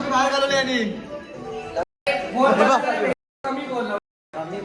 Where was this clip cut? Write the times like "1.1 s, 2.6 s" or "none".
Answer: none